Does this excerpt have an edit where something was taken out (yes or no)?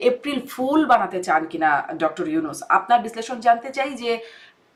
no